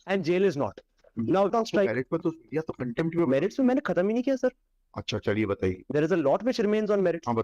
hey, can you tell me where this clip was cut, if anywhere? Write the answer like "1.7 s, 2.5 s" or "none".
1.5 s